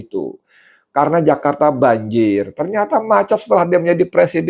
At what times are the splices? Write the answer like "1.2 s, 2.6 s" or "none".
none